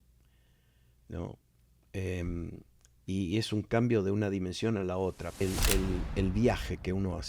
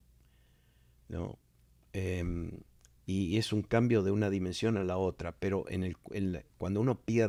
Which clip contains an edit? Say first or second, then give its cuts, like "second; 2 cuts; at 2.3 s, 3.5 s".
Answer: first; 1 cut; at 5.4 s